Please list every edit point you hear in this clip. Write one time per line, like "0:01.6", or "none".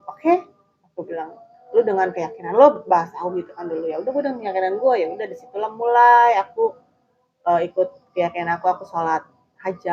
none